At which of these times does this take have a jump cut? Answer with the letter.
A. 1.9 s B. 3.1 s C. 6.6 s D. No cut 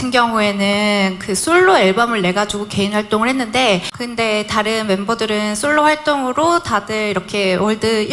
D